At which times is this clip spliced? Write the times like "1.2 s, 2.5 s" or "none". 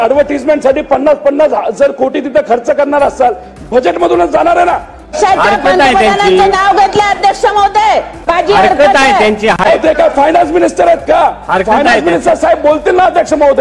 5.1 s, 8.3 s, 9.6 s